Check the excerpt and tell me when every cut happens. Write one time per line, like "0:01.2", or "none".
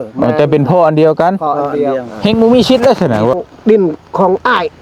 0:03.4